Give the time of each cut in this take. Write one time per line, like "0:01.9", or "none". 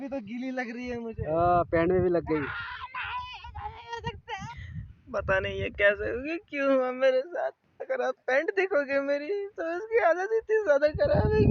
0:04.4